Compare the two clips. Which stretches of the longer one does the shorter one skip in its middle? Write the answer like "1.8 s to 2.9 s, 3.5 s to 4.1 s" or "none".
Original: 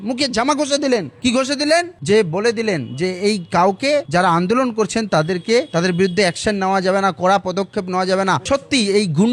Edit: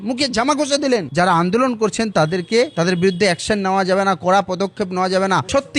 1.1 s to 4.1 s